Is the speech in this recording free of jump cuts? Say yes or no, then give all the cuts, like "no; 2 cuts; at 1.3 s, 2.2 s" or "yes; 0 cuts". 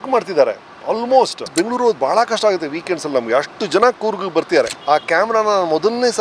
no; 2 cuts; at 1.4 s, 4.8 s